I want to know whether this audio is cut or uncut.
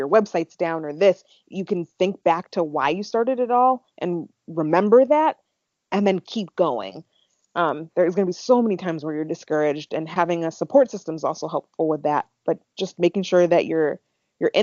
uncut